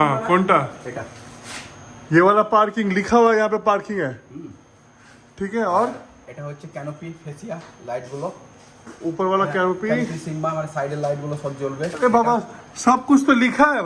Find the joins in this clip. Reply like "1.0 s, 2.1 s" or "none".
none